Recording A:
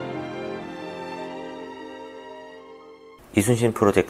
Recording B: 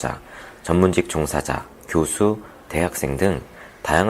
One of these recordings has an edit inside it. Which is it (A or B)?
A